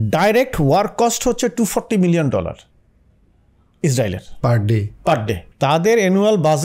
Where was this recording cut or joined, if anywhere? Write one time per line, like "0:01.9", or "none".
none